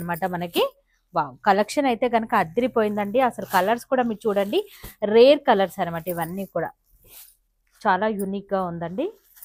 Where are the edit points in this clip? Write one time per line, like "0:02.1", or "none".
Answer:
none